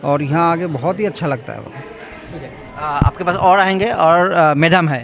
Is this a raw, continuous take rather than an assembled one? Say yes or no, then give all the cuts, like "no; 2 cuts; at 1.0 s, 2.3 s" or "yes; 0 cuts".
yes; 0 cuts